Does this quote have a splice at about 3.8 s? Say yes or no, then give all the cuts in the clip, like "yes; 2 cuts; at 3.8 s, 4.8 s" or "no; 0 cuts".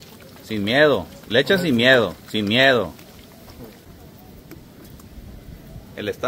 yes; 1 cut; at 3.8 s